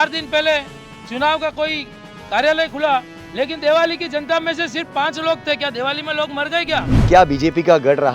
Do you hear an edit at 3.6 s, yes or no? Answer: no